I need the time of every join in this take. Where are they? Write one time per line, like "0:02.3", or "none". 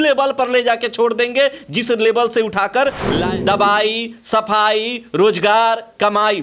0:03.2

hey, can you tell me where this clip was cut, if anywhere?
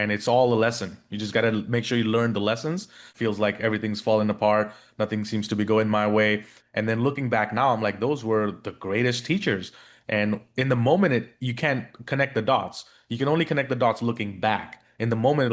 0:03.1

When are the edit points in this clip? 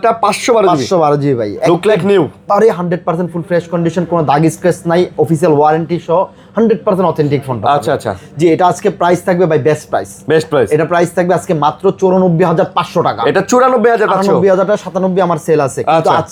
none

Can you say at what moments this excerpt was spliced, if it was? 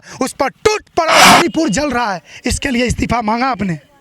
0:01.3

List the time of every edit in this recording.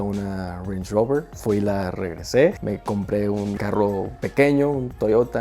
0:03.2

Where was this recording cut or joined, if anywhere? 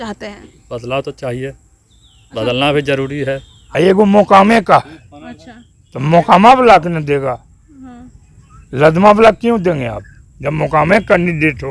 0:03.6

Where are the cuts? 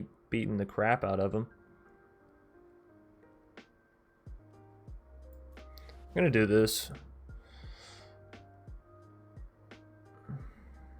0:04.4

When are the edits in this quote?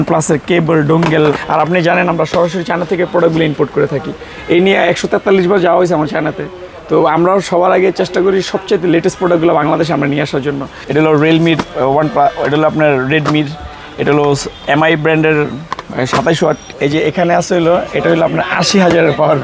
0:01.4
0:10.7
0:16.7

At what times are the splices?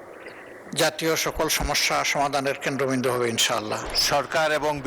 0:03.8

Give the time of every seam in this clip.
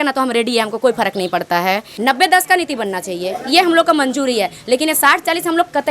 0:01.9

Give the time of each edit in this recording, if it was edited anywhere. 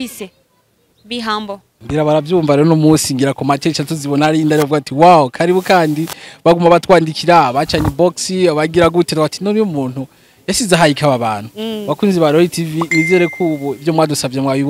0:01.7

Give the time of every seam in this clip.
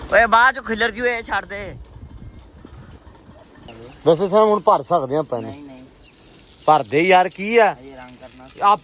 0:03.7

